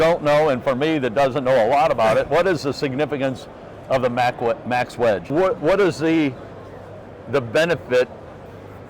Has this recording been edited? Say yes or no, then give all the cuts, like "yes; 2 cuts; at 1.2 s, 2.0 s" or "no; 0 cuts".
yes; 1 cut; at 5.2 s